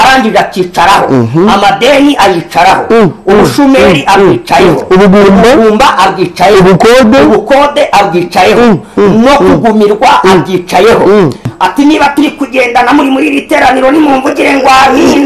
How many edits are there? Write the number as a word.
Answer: one